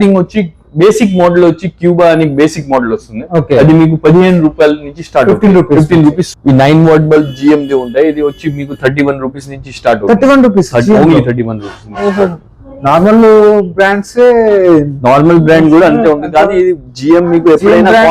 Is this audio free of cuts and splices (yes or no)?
no